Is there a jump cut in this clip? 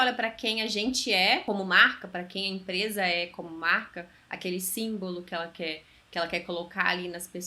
yes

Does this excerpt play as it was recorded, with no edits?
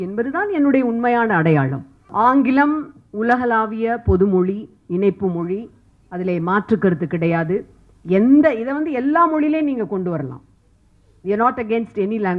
no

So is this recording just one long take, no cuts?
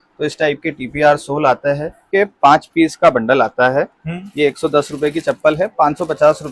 no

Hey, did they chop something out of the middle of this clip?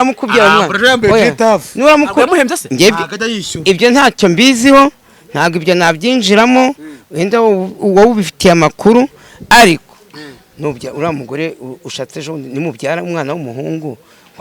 no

